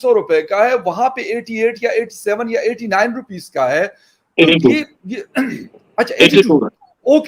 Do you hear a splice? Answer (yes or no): no